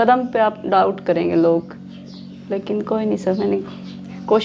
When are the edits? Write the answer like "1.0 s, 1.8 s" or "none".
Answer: none